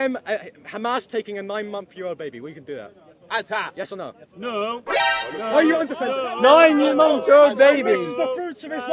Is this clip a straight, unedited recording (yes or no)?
yes